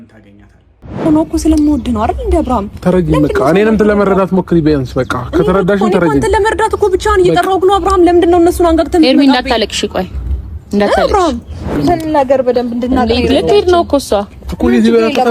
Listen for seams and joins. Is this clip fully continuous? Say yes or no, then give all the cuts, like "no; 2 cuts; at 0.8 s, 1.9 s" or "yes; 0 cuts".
no; 2 cuts; at 1.1 s, 11.8 s